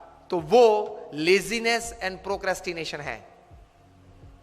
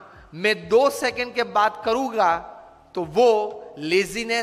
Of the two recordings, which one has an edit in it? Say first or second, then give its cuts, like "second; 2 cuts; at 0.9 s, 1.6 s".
first; 1 cut; at 3.3 s